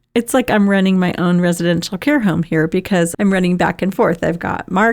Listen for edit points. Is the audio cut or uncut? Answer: cut